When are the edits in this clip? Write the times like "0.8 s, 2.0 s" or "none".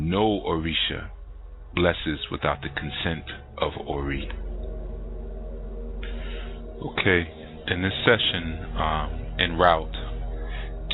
none